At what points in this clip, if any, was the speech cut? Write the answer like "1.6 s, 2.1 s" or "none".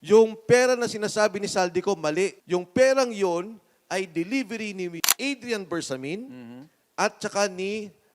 2.4 s, 5.1 s